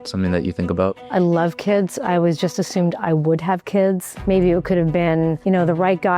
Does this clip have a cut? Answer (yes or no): yes